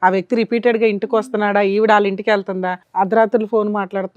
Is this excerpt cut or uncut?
cut